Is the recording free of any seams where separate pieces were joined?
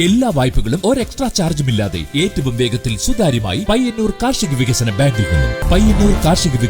no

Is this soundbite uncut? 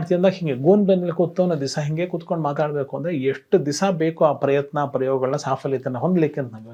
yes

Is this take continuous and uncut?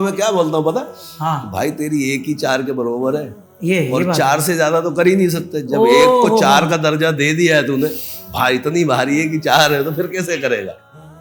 yes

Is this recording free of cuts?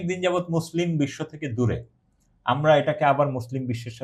yes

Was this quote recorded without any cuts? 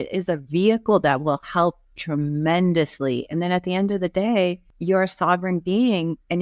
no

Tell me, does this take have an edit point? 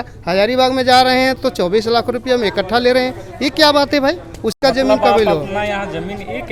no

